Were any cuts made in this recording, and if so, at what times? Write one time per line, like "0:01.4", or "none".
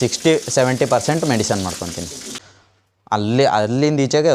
0:02.2